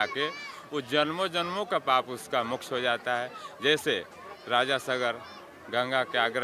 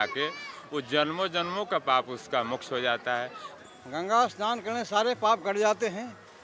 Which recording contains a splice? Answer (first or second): second